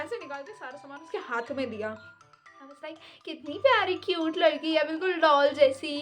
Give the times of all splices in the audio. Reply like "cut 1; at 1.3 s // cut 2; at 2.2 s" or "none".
cut 1; at 2.4 s